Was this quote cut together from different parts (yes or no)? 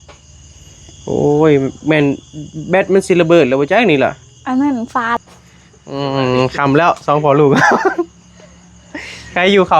yes